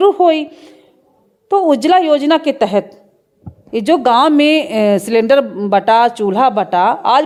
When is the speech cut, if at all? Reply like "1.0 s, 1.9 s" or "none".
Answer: none

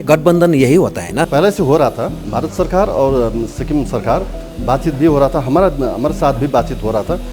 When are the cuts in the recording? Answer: 1.3 s, 2.2 s

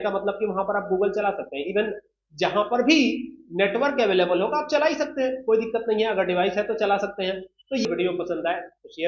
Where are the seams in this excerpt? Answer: 7.9 s

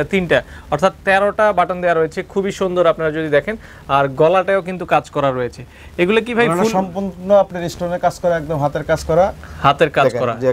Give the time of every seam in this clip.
none

